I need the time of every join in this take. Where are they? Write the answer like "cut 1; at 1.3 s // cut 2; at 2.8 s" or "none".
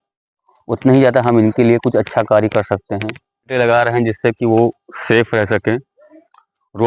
cut 1; at 3.5 s